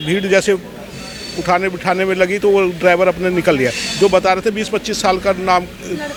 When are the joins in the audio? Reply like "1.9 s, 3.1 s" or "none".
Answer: none